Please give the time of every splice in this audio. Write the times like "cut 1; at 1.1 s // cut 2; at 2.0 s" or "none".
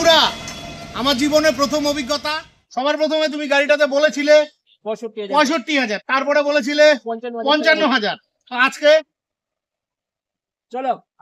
cut 1; at 2.6 s